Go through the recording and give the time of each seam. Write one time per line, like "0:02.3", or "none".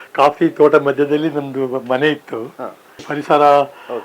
0:03.1